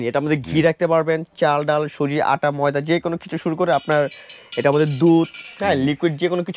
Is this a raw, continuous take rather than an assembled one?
yes; 0 cuts

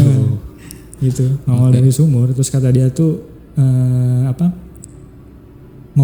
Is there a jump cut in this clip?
no; 0 cuts

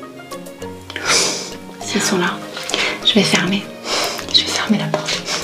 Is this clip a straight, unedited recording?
no; 1 cut; at 1.9 s

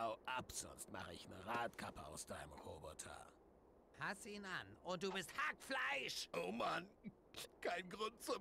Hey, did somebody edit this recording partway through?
no; 0 cuts

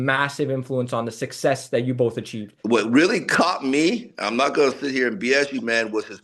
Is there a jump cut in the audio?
yes; 1 cut; at 2.5 s

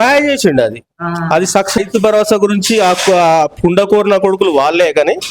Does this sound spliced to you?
yes; 1 cut; at 1.8 s

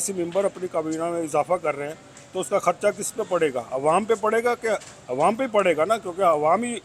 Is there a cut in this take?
no; 0 cuts

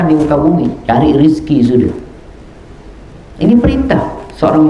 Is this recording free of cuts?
yes; 0 cuts

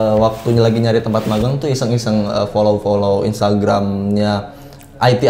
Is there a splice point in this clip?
no; 0 cuts

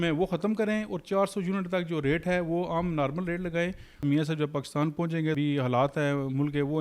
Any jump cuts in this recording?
yes; 2 cuts; at 4.0 s, 5.4 s

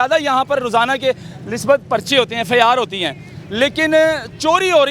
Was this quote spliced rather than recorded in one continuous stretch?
no; 0 cuts

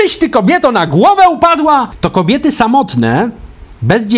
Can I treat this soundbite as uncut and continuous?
no; 1 cut; at 2.0 s

